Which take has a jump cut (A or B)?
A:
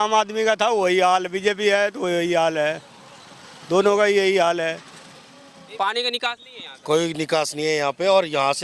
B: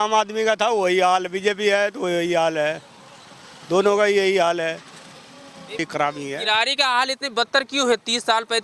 A